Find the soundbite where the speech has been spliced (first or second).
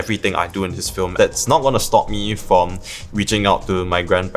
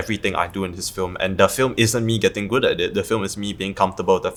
first